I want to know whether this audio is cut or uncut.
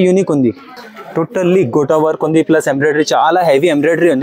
uncut